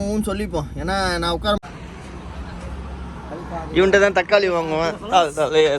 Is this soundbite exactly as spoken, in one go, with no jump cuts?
no; 1 cut; at 1.6 s

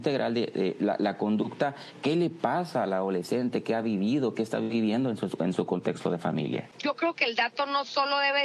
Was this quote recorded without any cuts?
no; 1 cut; at 6.7 s

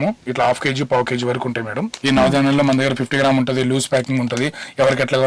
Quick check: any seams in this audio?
yes; 1 cut; at 1.9 s

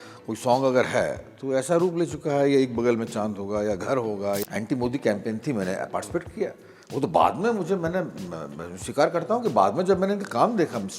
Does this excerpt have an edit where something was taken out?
yes; 1 cut; at 4.4 s

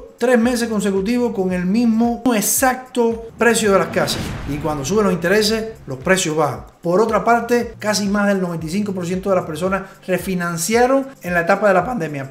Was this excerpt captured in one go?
no; 2 cuts; at 4.3 s, 7.7 s

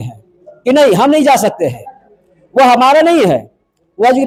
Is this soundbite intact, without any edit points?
yes; 0 cuts

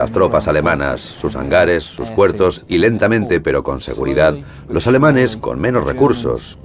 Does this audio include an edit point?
no; 0 cuts

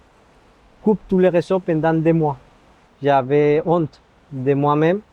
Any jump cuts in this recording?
yes; 1 cut; at 2.8 s

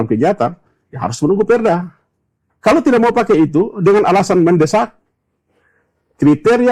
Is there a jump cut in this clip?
yes; 1 cut; at 2.4 s

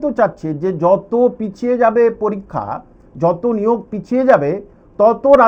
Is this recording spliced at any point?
no; 0 cuts

